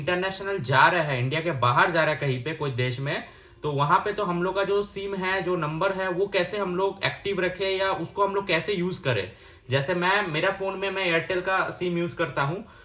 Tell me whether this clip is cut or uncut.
uncut